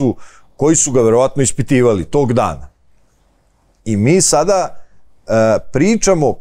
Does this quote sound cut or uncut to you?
uncut